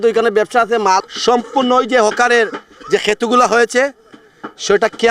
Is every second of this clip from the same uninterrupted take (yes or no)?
no